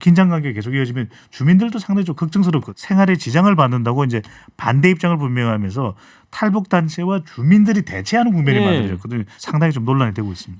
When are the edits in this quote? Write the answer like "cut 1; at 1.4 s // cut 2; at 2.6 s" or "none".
cut 1; at 2.7 s // cut 2; at 9.3 s